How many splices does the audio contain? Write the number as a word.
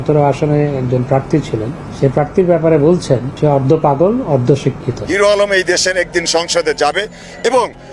one